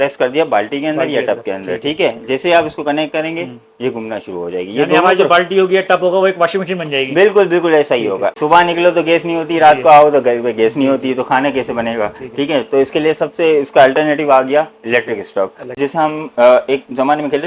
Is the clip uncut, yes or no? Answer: no